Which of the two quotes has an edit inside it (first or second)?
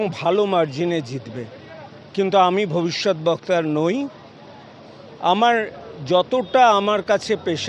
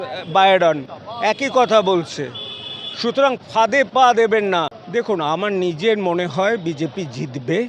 second